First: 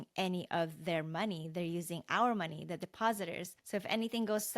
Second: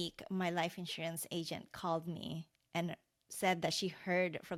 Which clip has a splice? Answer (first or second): first